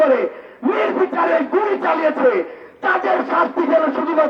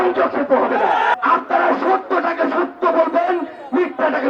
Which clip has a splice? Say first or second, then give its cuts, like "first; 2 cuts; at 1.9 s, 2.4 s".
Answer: second; 1 cut; at 1.1 s